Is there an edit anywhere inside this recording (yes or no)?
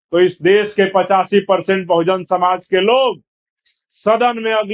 no